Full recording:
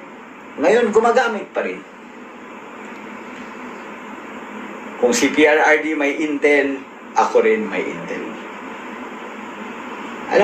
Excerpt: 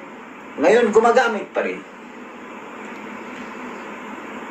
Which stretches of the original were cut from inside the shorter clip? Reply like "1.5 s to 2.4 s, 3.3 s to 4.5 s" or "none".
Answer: none